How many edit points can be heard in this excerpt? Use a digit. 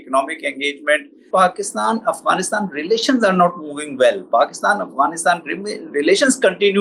1